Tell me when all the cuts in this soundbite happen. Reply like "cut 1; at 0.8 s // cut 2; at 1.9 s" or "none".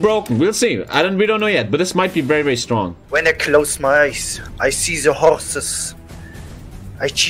cut 1; at 3.0 s